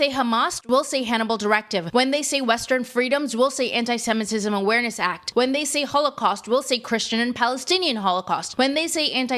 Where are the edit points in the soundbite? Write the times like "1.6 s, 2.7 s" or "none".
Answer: 1.9 s, 5.1 s, 8.5 s